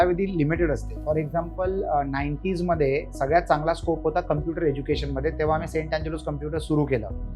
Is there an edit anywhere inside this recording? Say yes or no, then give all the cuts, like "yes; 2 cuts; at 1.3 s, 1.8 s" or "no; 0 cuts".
no; 0 cuts